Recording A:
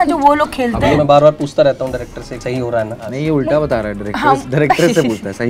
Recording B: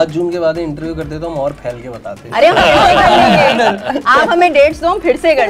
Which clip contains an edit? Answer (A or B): A